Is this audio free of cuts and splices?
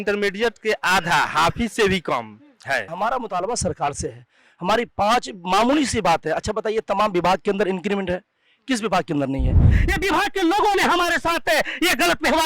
no; 2 cuts; at 2.9 s, 9.8 s

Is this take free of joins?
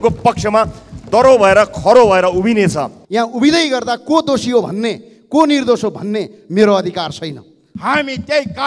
no; 2 cuts; at 2.9 s, 7.6 s

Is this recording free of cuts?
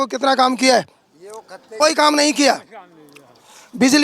no; 1 cut; at 1.6 s

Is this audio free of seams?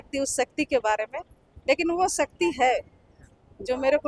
yes; 0 cuts

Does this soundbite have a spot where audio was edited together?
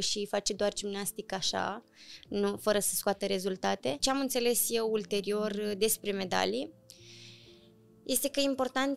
yes; 1 cut; at 4.0 s

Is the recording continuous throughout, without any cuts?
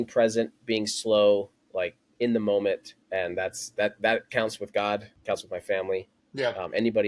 no; 4 cuts; at 1.8 s, 2.9 s, 5.1 s, 6.2 s

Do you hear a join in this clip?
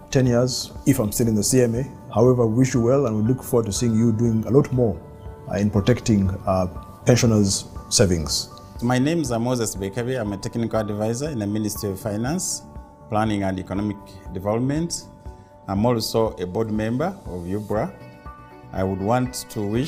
no; 0 cuts

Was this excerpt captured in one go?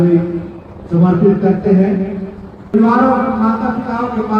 no; 1 cut; at 2.6 s

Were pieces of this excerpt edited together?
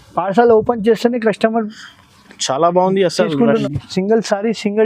yes; 1 cut; at 3.6 s

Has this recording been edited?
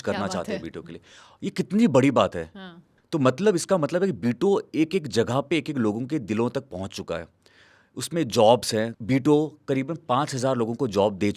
no; 0 cuts

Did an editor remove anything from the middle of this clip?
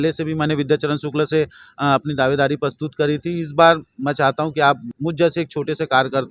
yes; 1 cut; at 4.9 s

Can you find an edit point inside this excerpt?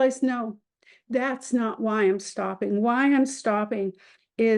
no; 0 cuts

